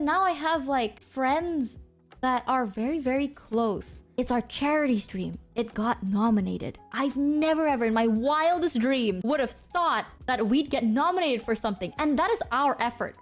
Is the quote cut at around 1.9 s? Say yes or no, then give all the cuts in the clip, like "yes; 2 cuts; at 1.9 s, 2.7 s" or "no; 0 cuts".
no; 2 cuts; at 4.0 s, 9.2 s